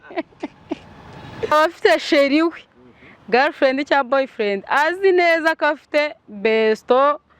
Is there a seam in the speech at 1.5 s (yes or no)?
yes